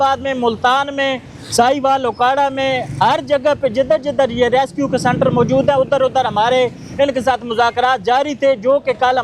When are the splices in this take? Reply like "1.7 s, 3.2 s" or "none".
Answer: none